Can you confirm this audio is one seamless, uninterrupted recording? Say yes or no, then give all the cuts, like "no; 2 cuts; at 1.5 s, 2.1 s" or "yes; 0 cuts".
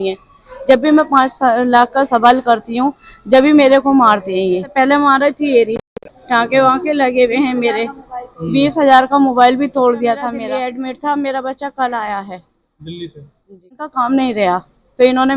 no; 3 cuts; at 4.7 s, 10.4 s, 13.9 s